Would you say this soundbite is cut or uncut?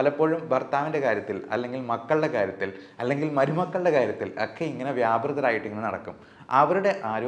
uncut